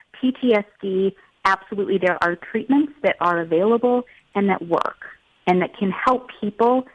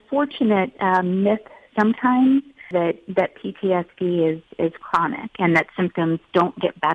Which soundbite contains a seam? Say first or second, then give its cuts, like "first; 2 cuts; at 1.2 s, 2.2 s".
second; 1 cut; at 2.7 s